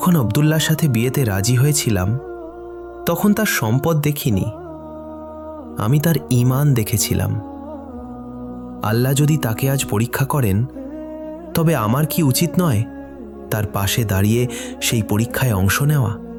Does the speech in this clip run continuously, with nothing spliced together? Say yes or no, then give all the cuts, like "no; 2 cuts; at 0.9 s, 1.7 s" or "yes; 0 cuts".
yes; 0 cuts